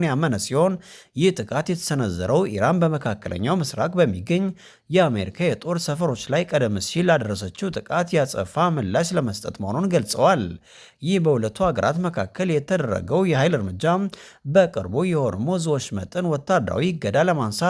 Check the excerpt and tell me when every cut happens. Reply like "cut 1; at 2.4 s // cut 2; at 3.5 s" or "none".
none